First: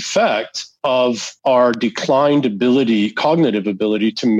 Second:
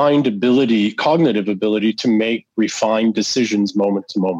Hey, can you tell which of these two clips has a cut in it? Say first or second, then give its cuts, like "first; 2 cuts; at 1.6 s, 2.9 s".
first; 1 cut; at 1.1 s